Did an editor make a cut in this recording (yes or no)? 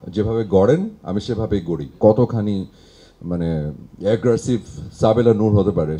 yes